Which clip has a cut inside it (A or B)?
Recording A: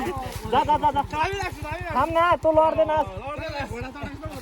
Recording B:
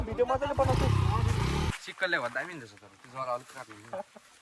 B